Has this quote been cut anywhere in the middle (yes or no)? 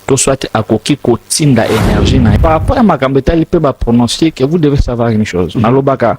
yes